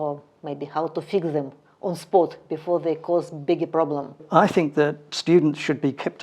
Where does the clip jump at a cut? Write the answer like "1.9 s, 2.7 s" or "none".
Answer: 4.1 s